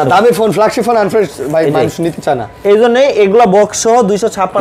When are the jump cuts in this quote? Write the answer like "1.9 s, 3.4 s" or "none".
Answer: none